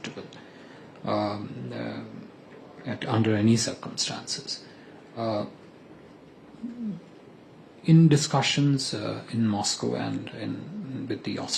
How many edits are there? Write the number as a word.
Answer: zero